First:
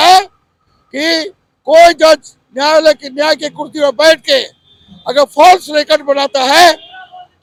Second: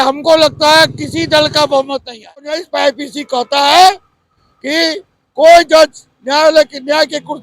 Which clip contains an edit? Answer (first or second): second